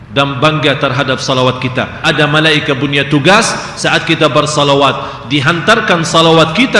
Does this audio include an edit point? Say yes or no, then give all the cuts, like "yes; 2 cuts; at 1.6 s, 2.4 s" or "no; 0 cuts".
yes; 1 cut; at 1.9 s